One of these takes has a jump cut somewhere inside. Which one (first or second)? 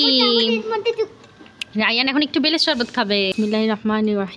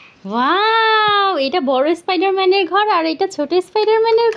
first